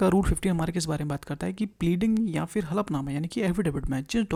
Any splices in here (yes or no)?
no